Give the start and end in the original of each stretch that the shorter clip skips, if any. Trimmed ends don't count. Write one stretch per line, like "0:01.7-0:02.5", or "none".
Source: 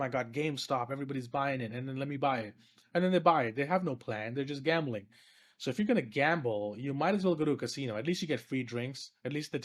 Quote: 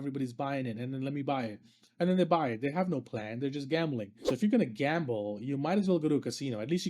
0:05.1-0:05.5